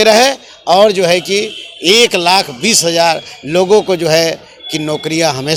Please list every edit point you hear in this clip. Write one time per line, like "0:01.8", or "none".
none